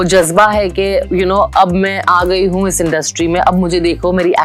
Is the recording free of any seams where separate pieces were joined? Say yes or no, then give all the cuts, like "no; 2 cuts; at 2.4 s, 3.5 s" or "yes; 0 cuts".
yes; 0 cuts